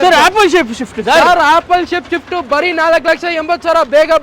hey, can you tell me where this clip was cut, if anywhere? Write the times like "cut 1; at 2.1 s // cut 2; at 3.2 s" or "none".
none